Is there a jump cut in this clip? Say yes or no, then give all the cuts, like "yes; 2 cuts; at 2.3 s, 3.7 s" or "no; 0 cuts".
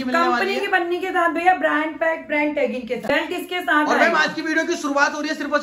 yes; 1 cut; at 3.0 s